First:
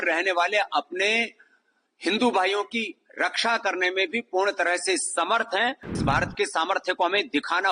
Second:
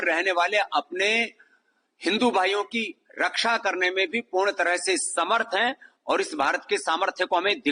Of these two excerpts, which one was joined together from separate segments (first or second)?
first